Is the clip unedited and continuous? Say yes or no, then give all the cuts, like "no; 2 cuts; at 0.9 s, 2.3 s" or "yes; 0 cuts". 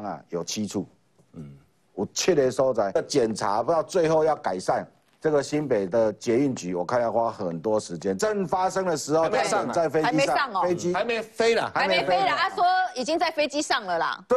no; 2 cuts; at 3.0 s, 8.2 s